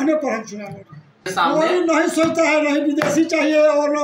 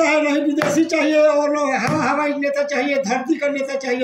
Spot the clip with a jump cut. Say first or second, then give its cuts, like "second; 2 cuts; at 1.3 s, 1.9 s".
first; 1 cut; at 1.3 s